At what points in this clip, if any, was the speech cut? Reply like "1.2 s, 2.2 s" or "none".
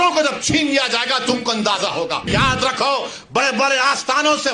2.3 s